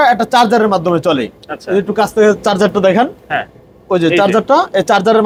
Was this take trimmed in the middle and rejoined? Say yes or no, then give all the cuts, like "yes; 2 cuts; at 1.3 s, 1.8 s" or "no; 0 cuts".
no; 0 cuts